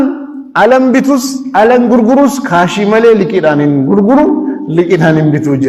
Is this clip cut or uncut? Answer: uncut